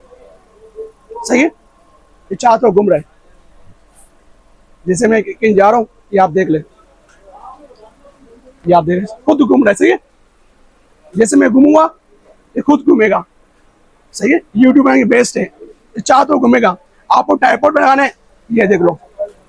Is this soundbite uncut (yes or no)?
yes